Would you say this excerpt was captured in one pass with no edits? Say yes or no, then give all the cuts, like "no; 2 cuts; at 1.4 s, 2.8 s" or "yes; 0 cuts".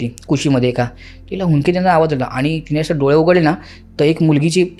yes; 0 cuts